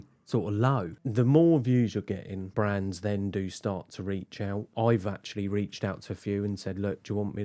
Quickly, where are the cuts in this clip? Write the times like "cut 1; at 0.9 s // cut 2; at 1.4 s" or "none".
cut 1; at 0.9 s // cut 2; at 2.4 s // cut 3; at 4.7 s